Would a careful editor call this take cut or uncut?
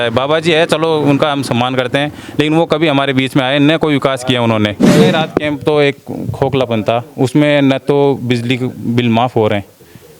cut